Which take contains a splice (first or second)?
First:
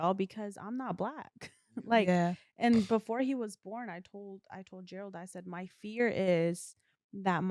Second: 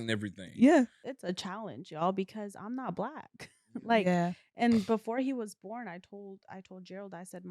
second